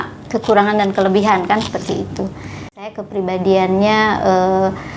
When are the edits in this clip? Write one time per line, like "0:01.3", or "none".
0:02.9